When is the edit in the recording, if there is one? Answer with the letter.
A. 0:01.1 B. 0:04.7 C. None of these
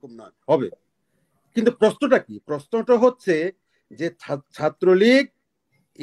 C